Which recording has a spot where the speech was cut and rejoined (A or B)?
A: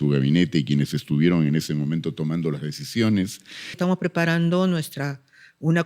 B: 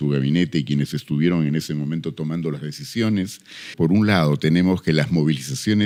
A